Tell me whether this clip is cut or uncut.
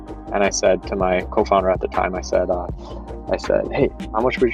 uncut